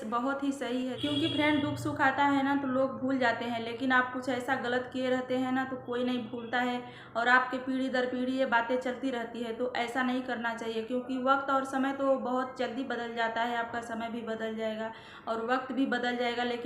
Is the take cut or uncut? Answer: cut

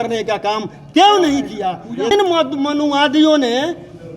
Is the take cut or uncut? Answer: cut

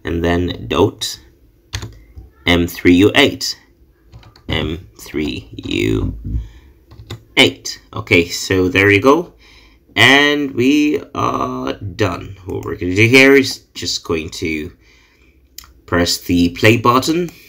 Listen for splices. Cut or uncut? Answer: uncut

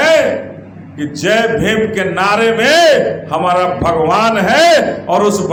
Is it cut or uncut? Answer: uncut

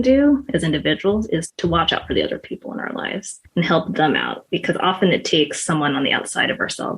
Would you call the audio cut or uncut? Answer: cut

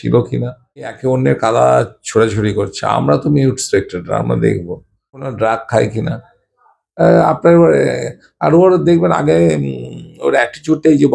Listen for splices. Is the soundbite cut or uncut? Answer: cut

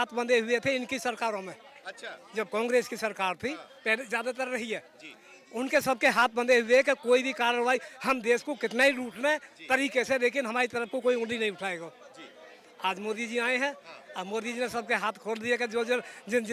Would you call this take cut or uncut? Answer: uncut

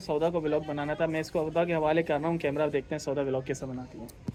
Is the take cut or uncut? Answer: uncut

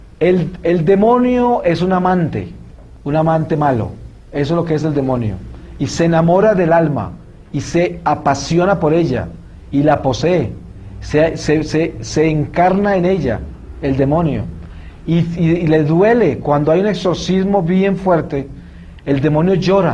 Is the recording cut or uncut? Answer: cut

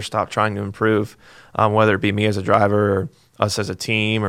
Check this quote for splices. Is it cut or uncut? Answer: uncut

